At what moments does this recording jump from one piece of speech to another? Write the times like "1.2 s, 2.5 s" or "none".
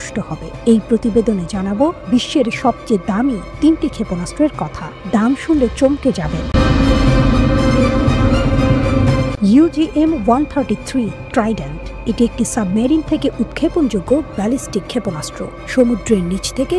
none